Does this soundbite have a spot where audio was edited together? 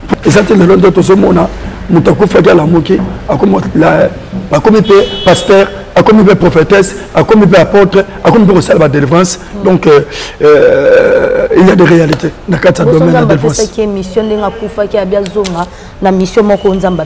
no; 0 cuts

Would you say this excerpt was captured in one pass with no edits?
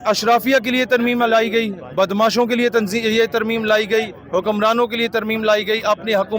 yes; 0 cuts

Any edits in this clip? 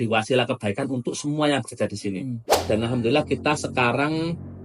yes; 1 cut; at 2.6 s

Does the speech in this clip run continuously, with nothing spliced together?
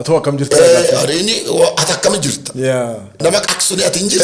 yes; 0 cuts

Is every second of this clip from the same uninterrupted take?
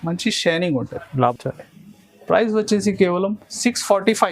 no; 1 cut; at 1.3 s

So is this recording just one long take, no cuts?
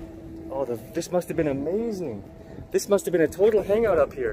yes; 0 cuts

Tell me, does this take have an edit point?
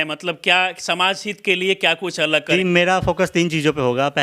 yes; 1 cut; at 2.5 s

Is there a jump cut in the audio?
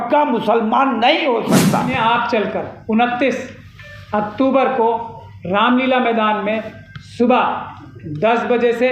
yes; 1 cut; at 1.9 s

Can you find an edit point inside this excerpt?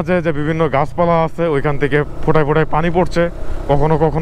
no; 0 cuts

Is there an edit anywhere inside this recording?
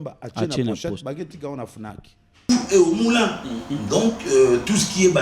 yes; 1 cut; at 2.4 s

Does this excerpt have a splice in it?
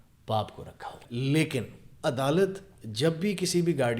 yes; 1 cut; at 1.0 s

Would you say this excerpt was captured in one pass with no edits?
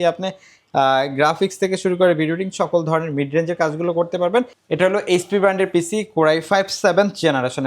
no; 1 cut; at 4.6 s

